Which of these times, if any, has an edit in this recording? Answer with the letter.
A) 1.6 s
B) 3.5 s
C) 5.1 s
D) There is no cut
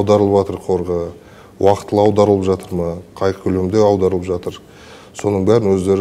D